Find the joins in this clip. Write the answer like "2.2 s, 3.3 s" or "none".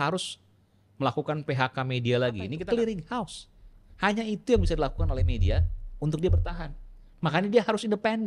2.5 s